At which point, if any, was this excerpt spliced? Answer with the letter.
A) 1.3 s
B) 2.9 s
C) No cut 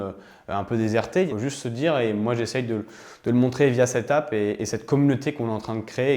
A